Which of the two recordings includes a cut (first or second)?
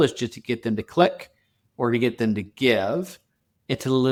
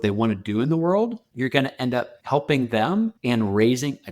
second